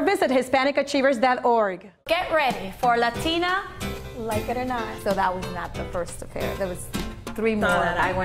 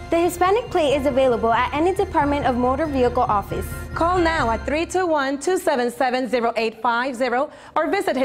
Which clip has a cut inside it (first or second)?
first